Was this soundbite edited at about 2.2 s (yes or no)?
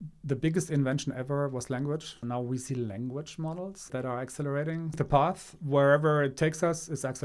yes